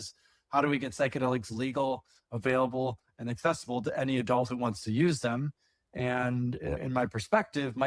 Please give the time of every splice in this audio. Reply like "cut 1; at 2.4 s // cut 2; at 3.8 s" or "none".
cut 1; at 6.8 s